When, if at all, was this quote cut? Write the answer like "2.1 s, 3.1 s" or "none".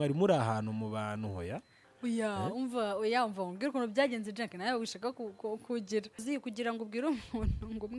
6.2 s